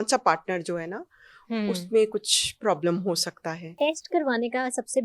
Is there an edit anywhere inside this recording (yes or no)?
yes